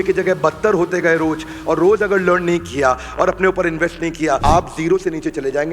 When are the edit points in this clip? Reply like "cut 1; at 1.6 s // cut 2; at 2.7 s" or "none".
cut 1; at 4.4 s